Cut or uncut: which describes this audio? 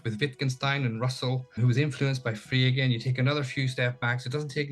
cut